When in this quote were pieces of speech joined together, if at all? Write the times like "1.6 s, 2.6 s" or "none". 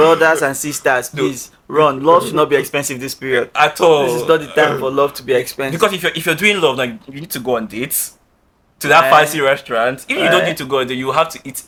none